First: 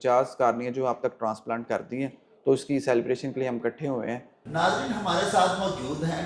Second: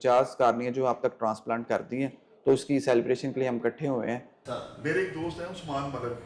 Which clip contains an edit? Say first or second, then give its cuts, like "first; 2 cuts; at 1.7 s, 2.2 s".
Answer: second; 1 cut; at 4.3 s